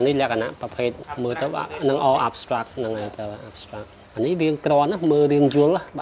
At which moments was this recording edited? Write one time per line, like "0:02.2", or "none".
0:01.1
0:04.0